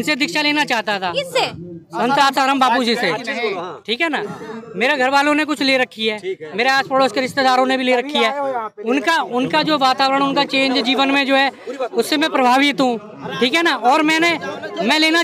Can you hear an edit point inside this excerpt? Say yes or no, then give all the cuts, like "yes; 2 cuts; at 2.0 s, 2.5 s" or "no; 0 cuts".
no; 0 cuts